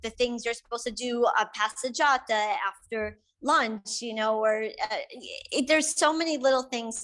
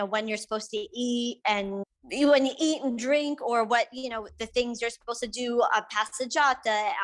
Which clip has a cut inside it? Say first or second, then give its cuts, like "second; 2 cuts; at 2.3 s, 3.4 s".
second; 1 cut; at 1.9 s